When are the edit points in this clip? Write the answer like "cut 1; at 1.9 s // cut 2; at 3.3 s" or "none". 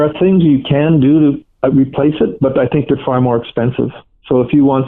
none